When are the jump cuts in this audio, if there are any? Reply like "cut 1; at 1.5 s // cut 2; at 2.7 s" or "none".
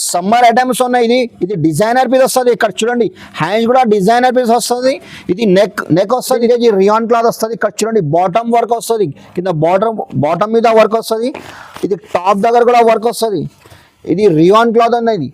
cut 1; at 6.4 s